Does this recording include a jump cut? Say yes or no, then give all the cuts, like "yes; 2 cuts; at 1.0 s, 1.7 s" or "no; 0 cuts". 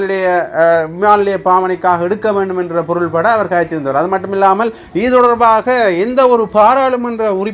no; 0 cuts